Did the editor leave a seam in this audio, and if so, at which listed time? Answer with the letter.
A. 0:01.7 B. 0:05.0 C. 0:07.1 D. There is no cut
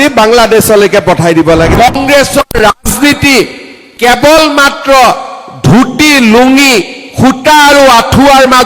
A